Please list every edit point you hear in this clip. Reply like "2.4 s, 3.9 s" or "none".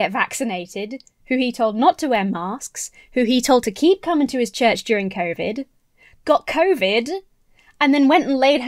none